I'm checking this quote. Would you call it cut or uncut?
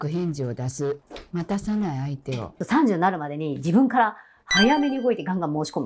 cut